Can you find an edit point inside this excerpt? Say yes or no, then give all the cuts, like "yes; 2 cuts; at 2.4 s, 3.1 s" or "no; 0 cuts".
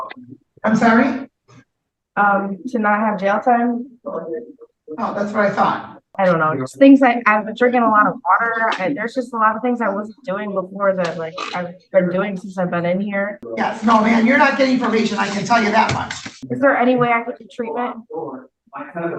yes; 3 cuts; at 6.0 s, 13.4 s, 16.4 s